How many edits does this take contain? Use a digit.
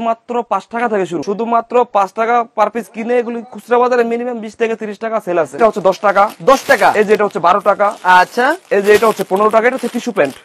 2